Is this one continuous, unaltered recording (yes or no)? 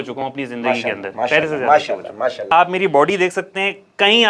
no